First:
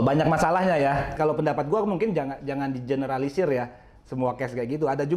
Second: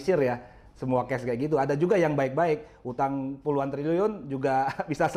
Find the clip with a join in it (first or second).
first